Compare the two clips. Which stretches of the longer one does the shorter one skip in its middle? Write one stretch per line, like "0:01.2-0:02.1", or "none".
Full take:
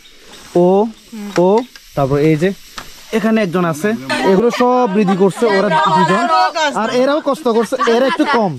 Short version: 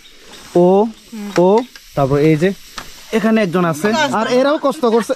0:04.0-0:06.6